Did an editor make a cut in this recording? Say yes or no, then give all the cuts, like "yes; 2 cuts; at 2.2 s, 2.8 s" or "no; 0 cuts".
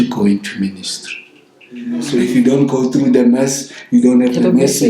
yes; 1 cut; at 2.0 s